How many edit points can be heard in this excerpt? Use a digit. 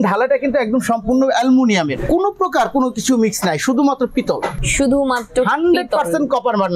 2